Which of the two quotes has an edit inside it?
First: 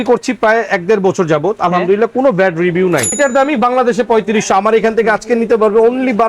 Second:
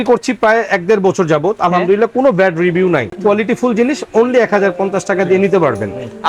first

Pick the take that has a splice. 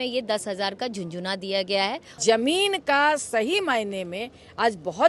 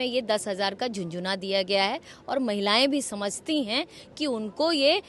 first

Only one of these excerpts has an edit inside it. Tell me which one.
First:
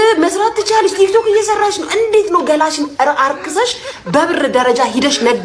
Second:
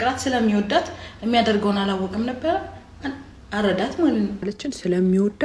second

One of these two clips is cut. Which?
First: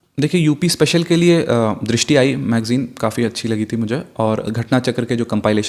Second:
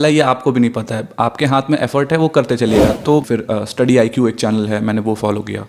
second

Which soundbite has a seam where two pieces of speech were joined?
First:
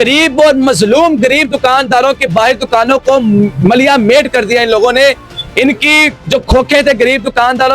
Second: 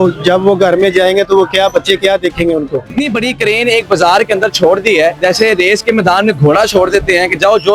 second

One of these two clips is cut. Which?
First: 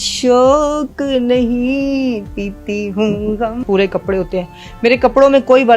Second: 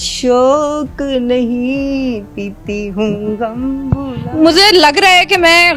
first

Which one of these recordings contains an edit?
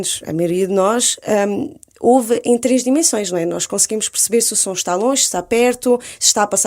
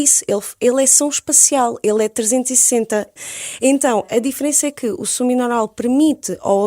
second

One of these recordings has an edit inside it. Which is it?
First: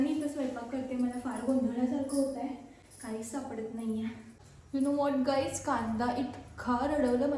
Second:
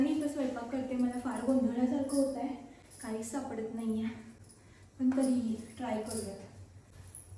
first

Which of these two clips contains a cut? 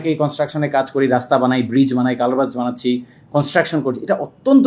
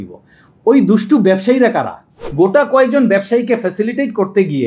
second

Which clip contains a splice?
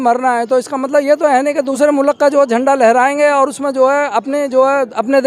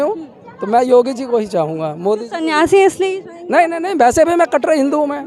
first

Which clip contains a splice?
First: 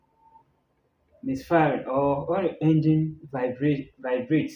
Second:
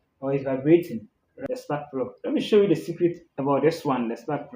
second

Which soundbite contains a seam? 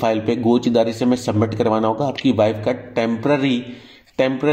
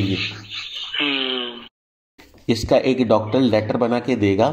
second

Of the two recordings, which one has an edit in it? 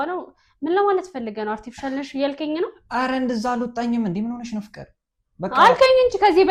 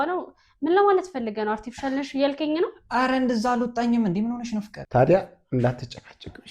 second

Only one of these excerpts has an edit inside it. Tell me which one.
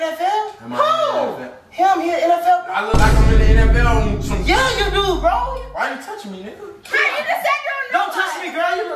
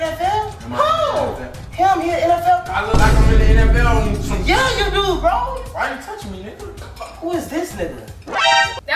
second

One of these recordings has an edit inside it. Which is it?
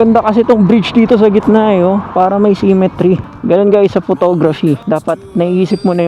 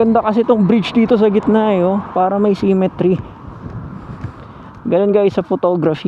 first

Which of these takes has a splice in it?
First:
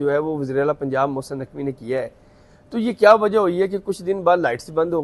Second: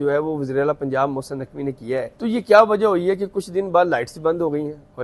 second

